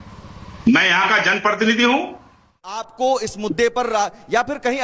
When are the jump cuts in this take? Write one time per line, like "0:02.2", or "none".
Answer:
0:02.9